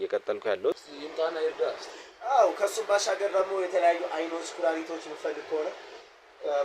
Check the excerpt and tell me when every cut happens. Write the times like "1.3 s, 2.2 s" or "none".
0.9 s